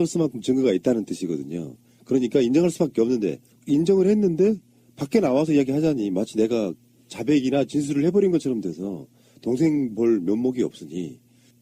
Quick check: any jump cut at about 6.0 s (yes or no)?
no